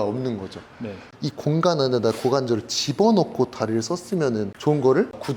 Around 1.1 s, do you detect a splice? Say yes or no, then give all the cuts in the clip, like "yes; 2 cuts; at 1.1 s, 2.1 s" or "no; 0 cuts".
yes; 1 cut; at 1.1 s